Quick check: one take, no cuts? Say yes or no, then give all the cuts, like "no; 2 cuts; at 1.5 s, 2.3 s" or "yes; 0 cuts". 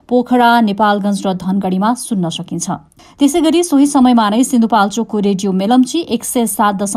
yes; 0 cuts